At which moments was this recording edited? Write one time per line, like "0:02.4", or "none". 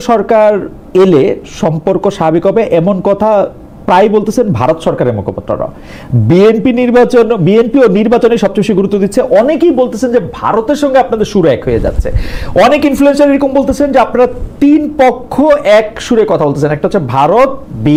none